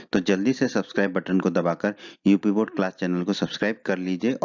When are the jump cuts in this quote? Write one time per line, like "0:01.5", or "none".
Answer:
0:03.4